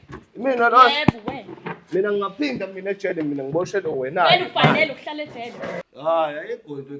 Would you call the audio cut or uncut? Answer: cut